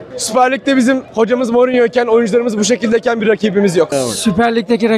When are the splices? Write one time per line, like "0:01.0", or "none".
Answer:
0:03.9